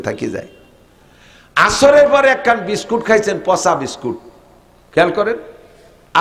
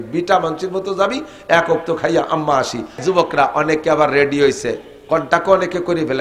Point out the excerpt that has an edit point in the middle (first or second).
second